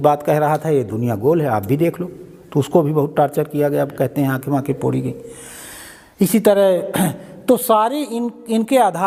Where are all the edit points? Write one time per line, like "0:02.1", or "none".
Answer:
none